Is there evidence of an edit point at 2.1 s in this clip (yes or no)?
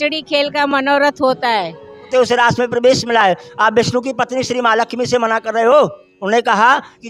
yes